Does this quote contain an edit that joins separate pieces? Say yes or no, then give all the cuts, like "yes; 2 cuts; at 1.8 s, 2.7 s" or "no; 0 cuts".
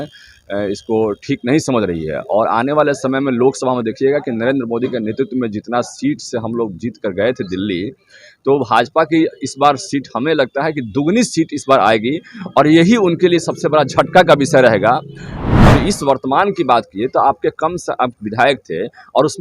yes; 1 cut; at 15.4 s